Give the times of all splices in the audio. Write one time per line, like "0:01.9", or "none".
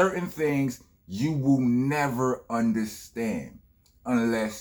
none